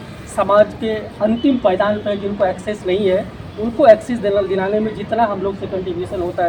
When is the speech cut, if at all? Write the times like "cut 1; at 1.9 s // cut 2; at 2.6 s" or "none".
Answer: none